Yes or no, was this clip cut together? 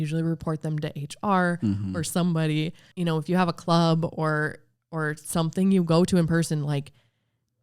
yes